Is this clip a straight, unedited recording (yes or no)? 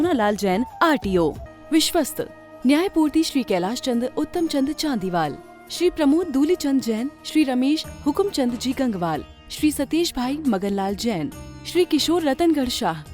no